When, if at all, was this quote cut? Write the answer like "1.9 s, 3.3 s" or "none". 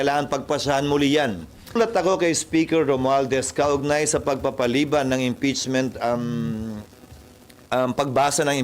1.8 s